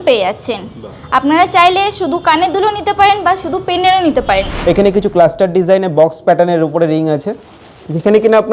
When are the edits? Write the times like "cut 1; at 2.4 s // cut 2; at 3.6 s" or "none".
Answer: cut 1; at 4.5 s